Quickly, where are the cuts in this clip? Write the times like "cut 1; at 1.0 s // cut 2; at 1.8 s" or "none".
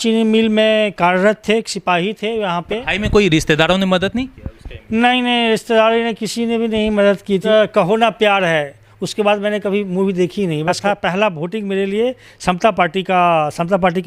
cut 1; at 2.9 s // cut 2; at 7.4 s // cut 3; at 10.8 s